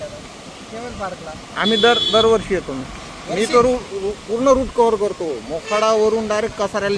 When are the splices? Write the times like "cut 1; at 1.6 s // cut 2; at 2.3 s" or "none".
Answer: none